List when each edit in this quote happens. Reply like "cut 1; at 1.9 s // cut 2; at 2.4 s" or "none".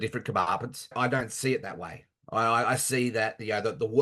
cut 1; at 0.9 s